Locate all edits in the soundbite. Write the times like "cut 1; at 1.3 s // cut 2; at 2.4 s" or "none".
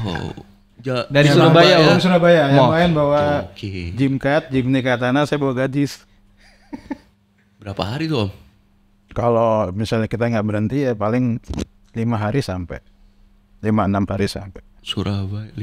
none